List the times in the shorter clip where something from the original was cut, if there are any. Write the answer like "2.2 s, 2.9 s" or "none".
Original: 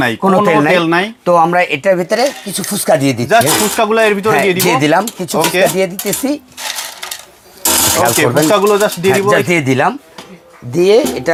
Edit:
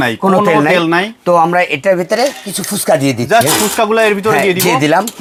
none